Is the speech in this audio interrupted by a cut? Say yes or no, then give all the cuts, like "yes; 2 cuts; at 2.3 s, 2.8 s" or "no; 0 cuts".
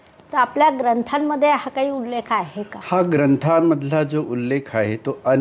no; 0 cuts